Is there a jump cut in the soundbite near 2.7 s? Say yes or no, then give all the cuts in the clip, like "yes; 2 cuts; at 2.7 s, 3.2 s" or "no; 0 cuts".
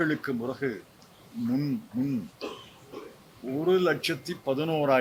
no; 0 cuts